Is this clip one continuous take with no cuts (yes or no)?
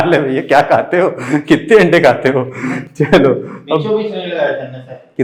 yes